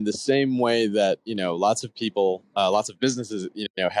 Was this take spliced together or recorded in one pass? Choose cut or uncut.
uncut